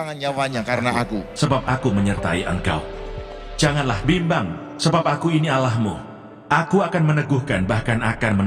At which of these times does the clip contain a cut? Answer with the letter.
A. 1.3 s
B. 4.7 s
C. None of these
A